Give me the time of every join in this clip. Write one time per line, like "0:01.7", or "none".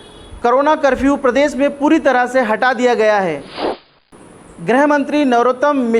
0:03.8